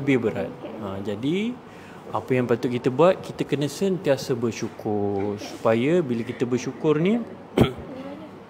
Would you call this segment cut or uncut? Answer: uncut